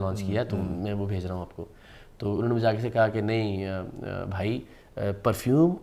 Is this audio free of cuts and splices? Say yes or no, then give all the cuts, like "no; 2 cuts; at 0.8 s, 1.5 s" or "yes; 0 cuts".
yes; 0 cuts